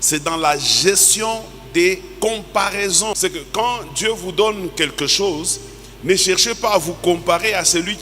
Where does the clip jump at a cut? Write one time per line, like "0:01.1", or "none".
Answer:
0:03.2